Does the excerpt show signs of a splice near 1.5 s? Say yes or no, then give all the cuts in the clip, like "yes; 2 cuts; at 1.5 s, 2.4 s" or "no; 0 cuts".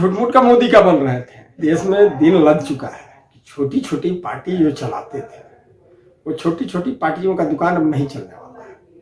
yes; 1 cut; at 1.5 s